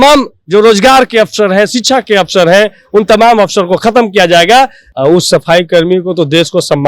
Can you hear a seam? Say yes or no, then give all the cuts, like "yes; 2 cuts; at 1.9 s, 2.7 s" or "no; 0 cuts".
yes; 1 cut; at 4.8 s